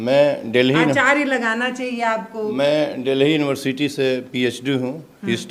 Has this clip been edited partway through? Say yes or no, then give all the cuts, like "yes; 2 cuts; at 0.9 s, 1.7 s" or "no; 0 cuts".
no; 0 cuts